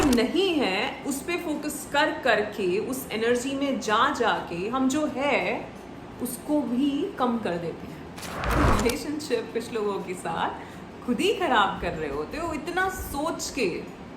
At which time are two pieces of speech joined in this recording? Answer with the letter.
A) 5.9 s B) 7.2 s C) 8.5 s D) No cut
C